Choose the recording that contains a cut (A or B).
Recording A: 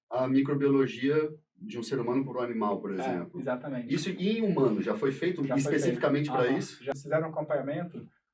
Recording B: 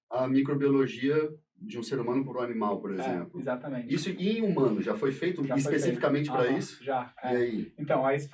A